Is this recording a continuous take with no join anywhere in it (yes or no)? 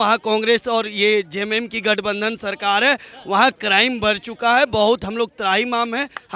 yes